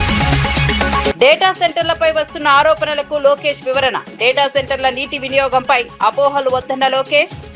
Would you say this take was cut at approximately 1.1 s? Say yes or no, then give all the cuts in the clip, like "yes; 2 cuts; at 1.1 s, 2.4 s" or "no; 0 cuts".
yes; 1 cut; at 1.1 s